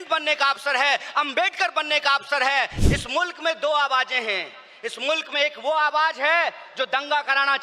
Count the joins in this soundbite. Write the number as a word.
one